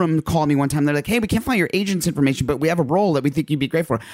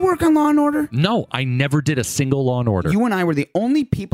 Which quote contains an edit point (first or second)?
second